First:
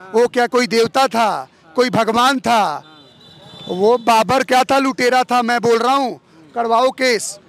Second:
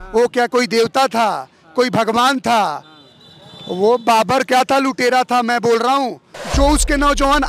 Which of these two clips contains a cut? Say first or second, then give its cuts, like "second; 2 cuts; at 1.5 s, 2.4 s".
second; 1 cut; at 6.4 s